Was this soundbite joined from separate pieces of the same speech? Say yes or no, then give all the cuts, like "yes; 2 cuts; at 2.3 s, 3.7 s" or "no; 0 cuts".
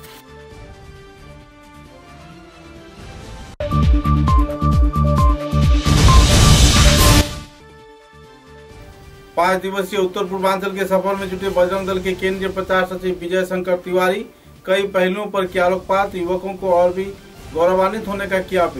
no; 0 cuts